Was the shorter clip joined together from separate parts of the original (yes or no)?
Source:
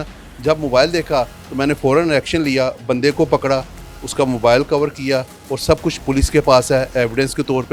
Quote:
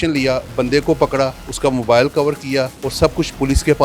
yes